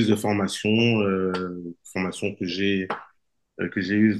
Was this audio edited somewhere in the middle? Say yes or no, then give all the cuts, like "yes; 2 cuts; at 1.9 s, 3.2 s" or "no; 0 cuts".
no; 0 cuts